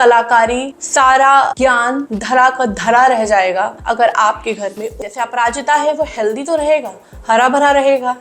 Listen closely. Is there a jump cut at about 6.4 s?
no; 1 cut; at 5.0 s

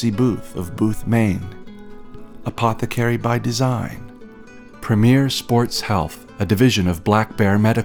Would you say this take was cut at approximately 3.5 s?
no; 0 cuts

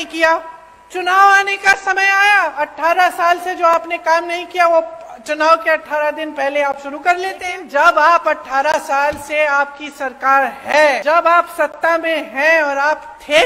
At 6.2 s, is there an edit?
no; 2 cuts; at 7.5 s, 11.0 s

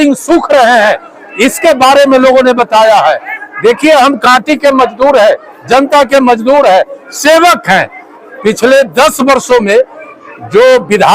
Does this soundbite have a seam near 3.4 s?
yes; 2 cuts; at 3.4 s, 8.1 s

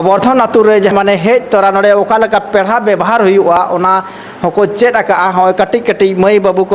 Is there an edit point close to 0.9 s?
yes; 1 cut; at 0.9 s

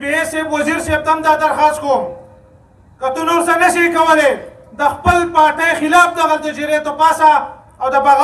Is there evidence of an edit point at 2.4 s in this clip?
no; 0 cuts

